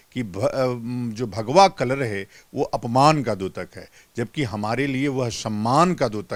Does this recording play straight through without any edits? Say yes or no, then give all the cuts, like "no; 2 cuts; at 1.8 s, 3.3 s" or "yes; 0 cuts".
yes; 0 cuts